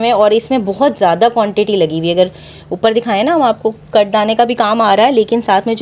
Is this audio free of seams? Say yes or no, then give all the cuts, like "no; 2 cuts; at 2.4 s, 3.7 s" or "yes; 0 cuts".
yes; 0 cuts